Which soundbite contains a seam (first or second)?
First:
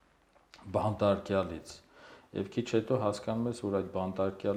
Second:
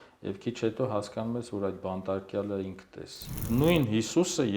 second